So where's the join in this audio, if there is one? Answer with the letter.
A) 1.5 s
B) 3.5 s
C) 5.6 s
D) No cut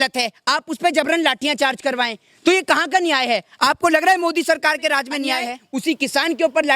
C